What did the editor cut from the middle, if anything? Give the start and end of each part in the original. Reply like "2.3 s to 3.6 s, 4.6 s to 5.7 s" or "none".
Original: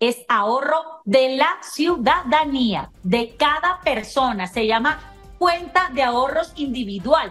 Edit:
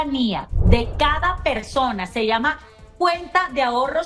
none